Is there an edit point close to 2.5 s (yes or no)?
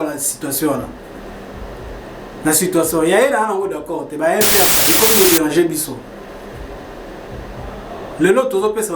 no